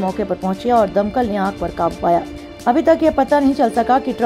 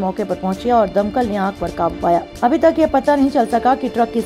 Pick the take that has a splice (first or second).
second